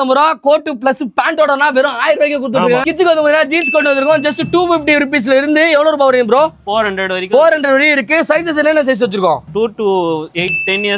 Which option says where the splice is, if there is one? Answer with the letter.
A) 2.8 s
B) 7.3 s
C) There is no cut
A